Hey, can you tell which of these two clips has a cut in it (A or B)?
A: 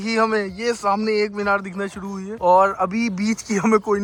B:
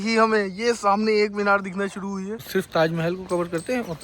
B